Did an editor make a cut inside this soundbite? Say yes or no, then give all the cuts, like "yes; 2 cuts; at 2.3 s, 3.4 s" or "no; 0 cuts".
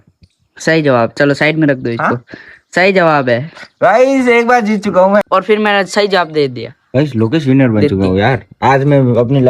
yes; 1 cut; at 5.2 s